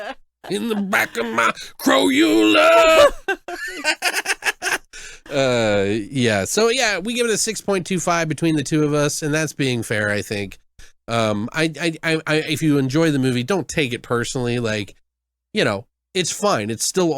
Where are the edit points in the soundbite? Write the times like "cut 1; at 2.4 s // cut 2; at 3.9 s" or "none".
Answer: none